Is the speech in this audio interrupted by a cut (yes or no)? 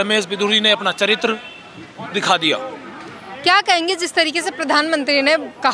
no